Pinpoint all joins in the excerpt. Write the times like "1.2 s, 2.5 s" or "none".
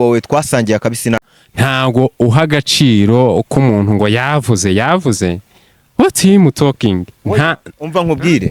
1.3 s